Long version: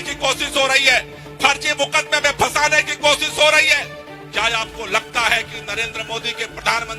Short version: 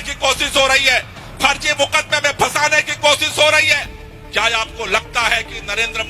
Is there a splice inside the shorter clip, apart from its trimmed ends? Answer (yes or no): no